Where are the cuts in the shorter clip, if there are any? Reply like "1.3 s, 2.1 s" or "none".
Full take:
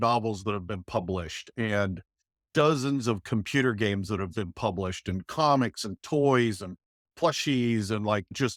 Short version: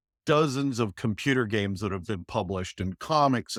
none